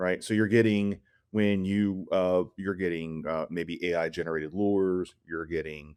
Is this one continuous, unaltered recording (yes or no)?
yes